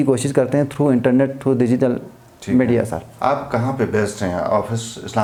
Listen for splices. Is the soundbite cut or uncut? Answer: uncut